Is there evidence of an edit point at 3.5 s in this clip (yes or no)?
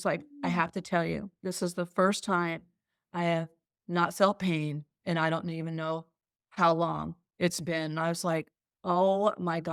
no